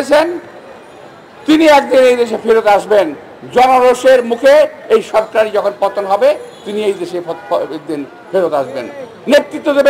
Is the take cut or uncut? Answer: uncut